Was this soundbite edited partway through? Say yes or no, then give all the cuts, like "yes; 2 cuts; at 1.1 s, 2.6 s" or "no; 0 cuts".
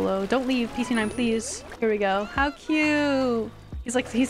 no; 0 cuts